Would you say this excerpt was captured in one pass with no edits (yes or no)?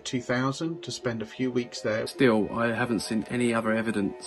no